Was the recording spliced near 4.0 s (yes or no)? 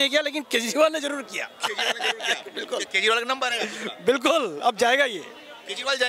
no